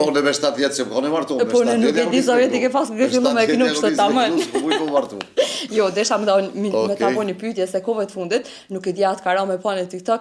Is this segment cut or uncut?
uncut